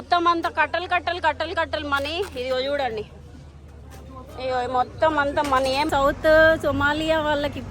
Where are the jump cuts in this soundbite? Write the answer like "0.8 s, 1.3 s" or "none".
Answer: 5.9 s